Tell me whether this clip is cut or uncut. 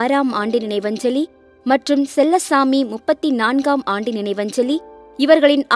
uncut